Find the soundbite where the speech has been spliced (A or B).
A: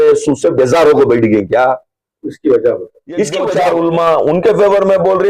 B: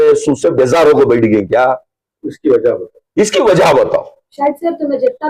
A